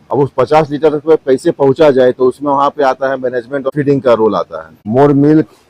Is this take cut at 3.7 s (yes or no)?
yes